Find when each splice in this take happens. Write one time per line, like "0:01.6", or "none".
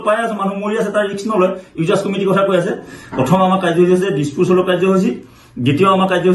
0:03.0